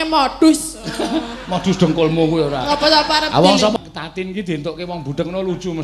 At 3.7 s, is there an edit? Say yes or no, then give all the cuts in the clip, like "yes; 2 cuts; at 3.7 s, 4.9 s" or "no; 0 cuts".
yes; 1 cut; at 3.7 s